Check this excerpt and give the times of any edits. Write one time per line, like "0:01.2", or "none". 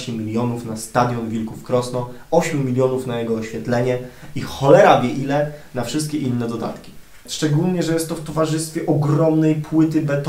0:07.3

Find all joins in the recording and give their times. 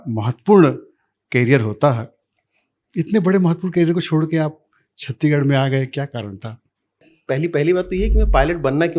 0:07.1

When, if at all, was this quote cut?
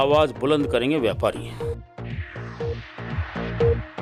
none

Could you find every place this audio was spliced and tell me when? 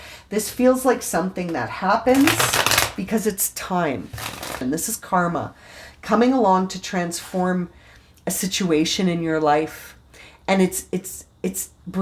0:04.6

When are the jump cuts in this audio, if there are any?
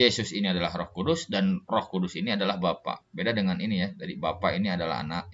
none

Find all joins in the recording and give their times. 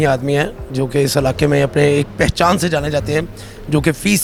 none

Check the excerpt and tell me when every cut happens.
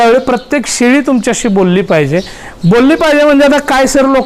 none

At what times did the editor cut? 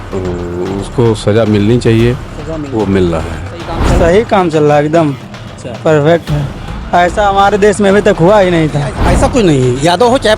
0:03.8
0:09.0

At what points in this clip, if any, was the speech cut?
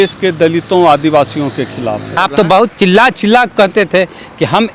0:02.2

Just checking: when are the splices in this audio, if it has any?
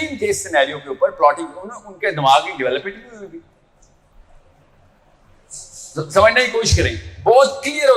none

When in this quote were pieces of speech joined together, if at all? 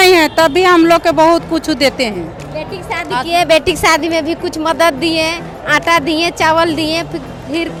none

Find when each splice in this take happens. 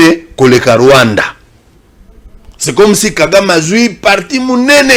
none

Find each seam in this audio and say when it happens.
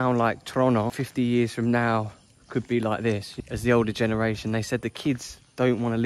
0:01.0
0:03.3

